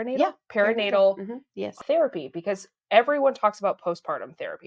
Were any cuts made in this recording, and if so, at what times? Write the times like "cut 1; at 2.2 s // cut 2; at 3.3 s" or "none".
cut 1; at 1.8 s